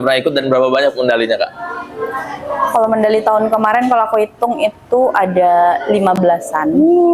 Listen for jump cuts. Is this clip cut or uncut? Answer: uncut